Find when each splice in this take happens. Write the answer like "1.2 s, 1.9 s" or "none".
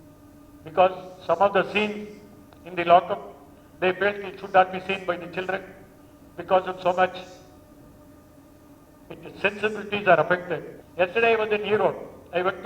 10.8 s